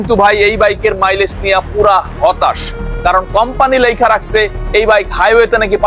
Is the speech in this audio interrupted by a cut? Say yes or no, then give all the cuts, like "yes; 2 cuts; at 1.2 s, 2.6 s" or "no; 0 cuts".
no; 0 cuts